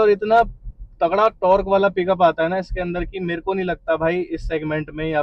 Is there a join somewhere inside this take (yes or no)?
no